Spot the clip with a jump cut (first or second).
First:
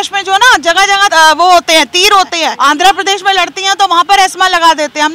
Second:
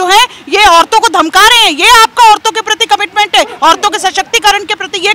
first